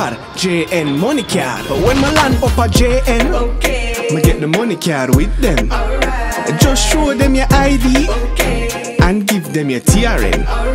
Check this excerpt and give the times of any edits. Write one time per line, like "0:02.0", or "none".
none